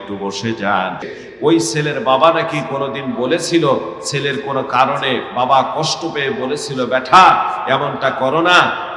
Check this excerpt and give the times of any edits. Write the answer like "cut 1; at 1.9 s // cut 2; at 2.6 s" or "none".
cut 1; at 1.1 s